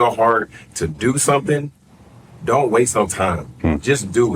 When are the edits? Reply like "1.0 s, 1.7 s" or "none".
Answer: none